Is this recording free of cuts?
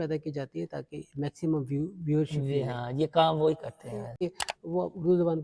no; 1 cut; at 4.2 s

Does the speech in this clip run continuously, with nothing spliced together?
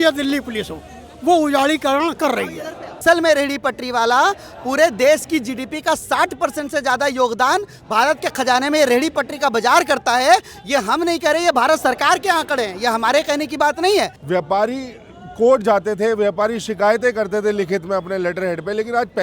no; 2 cuts; at 3.0 s, 14.2 s

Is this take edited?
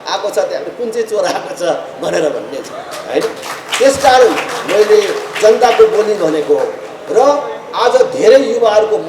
no; 0 cuts

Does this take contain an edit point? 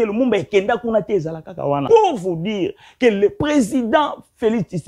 yes; 1 cut; at 1.8 s

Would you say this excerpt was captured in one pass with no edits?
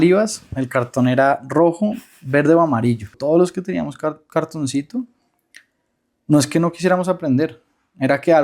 no; 1 cut; at 3.1 s

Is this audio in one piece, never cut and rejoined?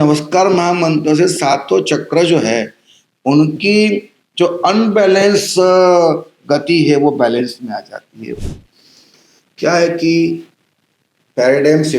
no; 1 cut; at 8.5 s

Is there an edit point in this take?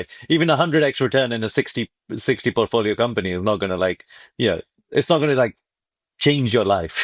no; 0 cuts

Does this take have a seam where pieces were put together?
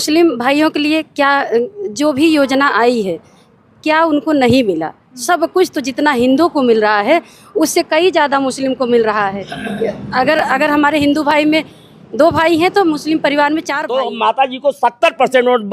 yes; 1 cut; at 13.8 s

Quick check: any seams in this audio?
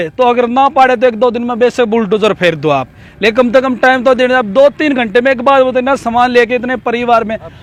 no; 0 cuts

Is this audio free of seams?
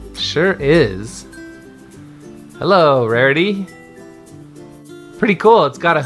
no; 1 cut; at 2.1 s

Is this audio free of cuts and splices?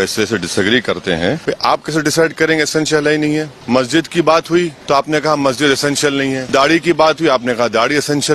no; 4 cuts; at 1.4 s, 3.5 s, 4.8 s, 6.4 s

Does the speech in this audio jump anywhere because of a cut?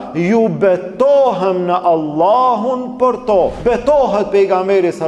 yes; 1 cut; at 3.6 s

